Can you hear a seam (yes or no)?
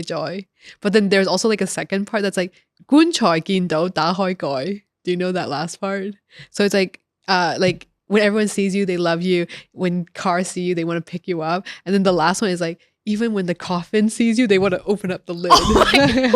no